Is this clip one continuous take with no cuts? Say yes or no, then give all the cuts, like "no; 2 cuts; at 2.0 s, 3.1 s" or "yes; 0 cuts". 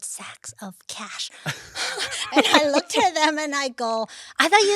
yes; 0 cuts